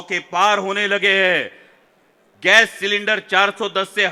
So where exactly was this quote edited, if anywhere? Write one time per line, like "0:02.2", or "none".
none

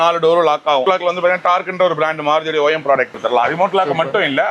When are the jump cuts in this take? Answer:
0:00.8
0:03.1

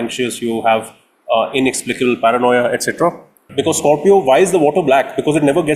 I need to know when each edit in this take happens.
0:03.5

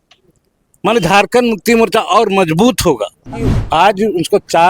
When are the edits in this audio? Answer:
0:03.6

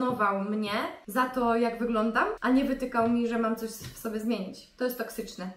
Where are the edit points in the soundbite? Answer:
0:01.0
0:02.4

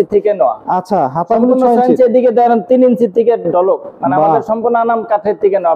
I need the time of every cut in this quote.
none

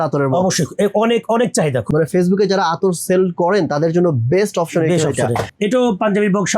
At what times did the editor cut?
0:01.9
0:05.5

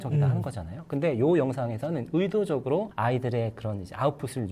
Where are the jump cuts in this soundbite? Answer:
none

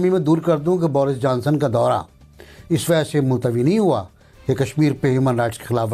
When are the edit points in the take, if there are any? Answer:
none

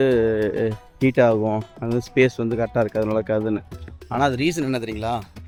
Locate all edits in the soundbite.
none

